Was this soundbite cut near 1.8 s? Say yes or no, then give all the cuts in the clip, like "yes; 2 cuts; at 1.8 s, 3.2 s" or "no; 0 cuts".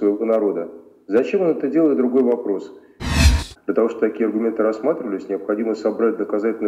no; 1 cut; at 3.1 s